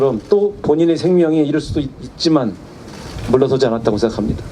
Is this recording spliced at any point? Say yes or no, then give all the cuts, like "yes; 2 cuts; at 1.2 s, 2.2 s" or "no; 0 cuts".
yes; 1 cut; at 1.2 s